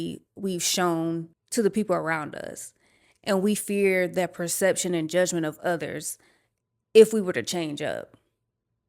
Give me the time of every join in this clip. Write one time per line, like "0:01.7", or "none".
0:01.4